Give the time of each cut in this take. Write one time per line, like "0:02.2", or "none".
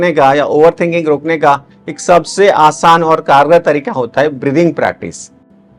none